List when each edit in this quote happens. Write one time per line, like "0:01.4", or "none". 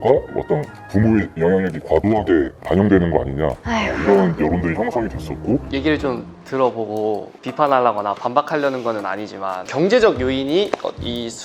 0:05.7